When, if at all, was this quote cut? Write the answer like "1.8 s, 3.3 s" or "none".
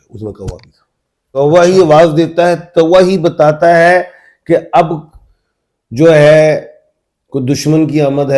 1.4 s